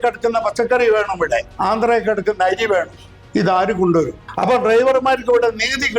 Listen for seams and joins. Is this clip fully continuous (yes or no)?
no